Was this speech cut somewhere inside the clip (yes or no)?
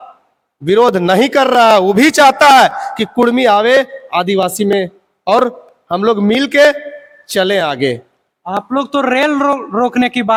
no